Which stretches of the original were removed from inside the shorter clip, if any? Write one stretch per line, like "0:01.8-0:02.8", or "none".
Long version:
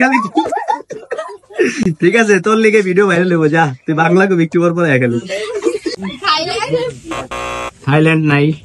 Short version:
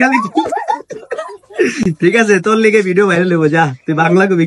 none